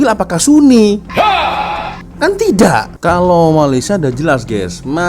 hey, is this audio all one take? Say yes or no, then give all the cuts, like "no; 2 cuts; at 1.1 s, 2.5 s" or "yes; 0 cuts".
no; 1 cut; at 2.9 s